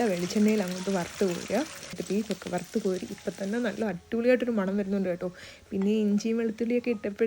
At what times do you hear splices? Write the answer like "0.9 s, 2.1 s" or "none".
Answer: 2.0 s